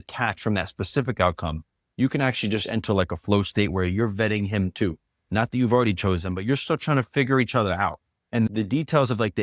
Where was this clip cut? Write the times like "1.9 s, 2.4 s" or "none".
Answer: 8.5 s